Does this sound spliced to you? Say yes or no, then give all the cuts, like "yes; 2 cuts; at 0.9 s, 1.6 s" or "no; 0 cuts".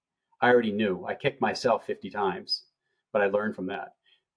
no; 0 cuts